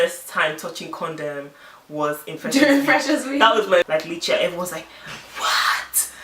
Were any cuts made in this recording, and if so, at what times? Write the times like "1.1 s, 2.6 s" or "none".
3.9 s